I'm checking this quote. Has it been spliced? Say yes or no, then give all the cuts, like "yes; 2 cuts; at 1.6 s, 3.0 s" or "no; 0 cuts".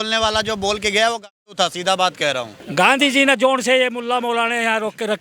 yes; 1 cut; at 2.5 s